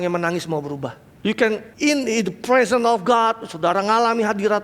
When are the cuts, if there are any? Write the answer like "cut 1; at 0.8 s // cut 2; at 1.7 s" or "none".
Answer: cut 1; at 1.1 s // cut 2; at 1.7 s

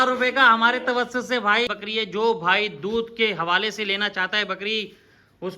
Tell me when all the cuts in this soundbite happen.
cut 1; at 1.7 s

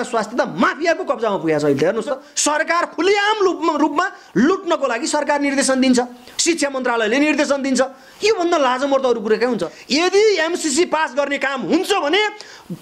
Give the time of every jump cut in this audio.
cut 1; at 2.3 s // cut 2; at 9.7 s

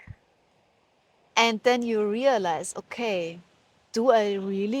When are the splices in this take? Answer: cut 1; at 1.3 s

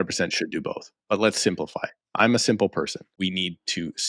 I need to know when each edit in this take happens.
cut 1; at 3.0 s

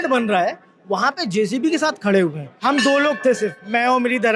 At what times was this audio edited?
cut 1; at 2.5 s

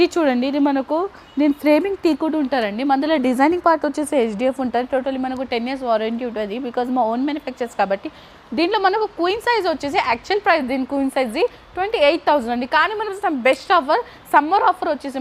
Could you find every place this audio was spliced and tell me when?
none

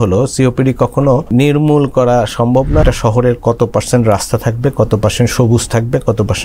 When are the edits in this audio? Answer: cut 1; at 1.3 s // cut 2; at 2.8 s

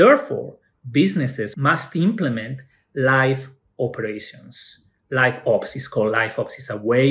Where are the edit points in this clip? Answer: cut 1; at 1.5 s

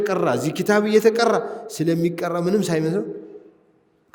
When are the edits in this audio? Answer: none

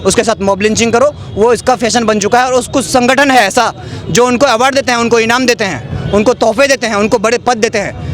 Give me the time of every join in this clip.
none

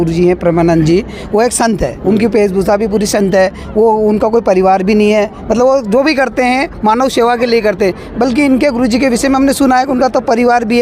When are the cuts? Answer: none

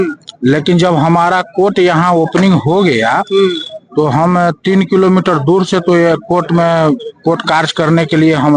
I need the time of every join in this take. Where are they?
none

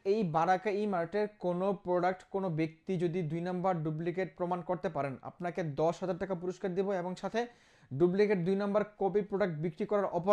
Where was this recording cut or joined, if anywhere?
none

